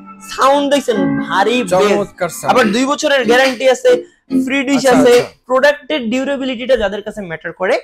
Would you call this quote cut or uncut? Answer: cut